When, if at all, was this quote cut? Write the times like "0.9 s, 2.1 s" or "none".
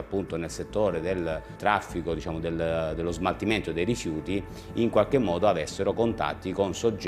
1.5 s